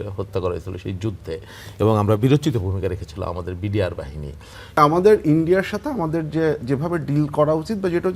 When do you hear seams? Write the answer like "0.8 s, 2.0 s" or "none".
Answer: 4.8 s